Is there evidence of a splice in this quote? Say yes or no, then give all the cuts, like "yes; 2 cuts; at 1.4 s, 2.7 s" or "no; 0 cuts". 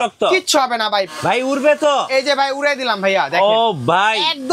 yes; 1 cut; at 1.1 s